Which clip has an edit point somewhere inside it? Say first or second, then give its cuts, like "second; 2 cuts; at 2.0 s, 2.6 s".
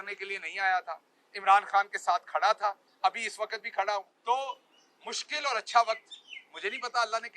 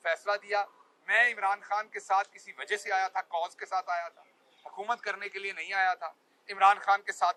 first; 1 cut; at 4.1 s